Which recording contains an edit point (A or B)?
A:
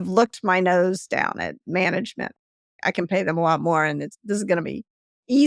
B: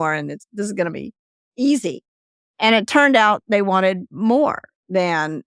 A